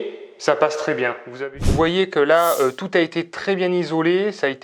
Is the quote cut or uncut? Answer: cut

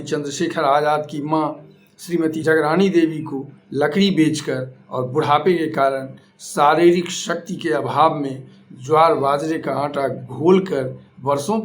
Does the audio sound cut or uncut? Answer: uncut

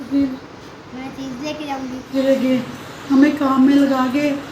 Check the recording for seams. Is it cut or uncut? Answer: cut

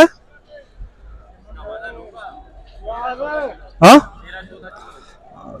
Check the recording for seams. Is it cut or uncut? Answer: uncut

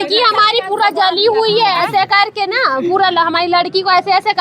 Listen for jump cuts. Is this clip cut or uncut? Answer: uncut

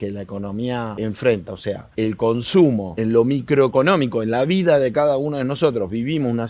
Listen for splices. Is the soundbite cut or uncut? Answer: cut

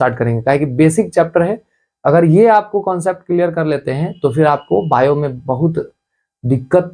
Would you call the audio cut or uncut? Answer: uncut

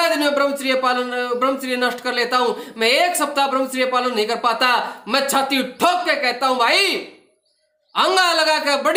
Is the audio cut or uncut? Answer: uncut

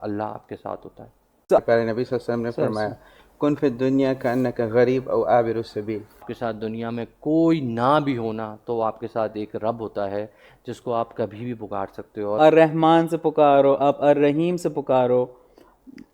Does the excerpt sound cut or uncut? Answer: cut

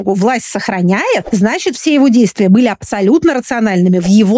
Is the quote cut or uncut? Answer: cut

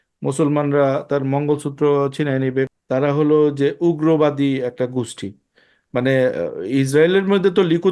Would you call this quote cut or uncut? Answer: cut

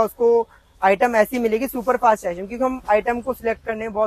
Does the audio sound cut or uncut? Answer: uncut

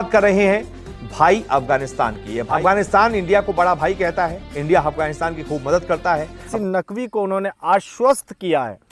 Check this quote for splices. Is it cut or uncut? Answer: cut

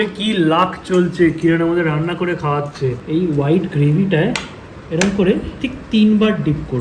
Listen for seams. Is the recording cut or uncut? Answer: cut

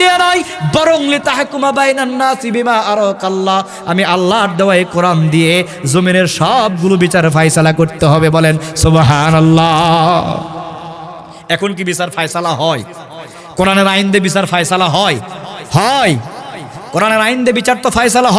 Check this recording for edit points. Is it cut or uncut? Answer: uncut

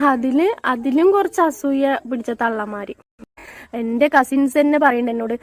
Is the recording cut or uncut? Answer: cut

